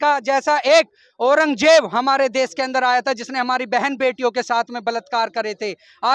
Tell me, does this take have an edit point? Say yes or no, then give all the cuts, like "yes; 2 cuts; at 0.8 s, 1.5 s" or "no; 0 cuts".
no; 0 cuts